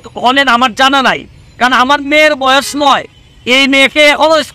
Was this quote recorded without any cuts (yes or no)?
yes